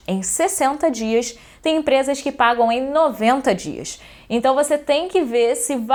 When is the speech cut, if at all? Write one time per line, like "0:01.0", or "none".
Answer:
none